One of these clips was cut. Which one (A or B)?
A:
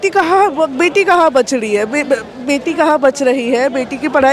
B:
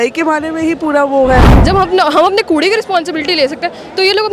B